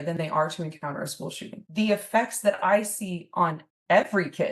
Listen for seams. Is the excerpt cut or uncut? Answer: cut